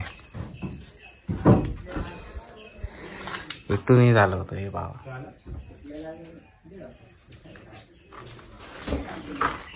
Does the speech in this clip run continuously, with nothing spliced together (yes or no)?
yes